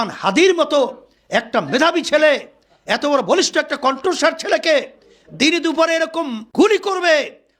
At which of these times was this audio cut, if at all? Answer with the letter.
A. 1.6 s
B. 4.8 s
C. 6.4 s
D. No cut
C